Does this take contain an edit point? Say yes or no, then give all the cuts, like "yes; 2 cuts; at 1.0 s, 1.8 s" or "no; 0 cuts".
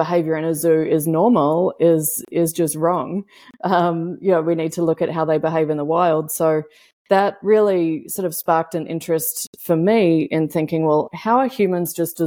yes; 1 cut; at 11.1 s